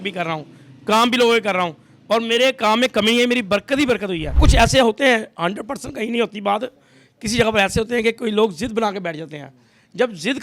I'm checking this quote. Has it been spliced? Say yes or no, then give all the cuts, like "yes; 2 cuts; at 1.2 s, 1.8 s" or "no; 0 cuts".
yes; 1 cut; at 4.4 s